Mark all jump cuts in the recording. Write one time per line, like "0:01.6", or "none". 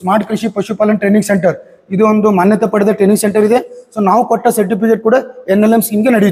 none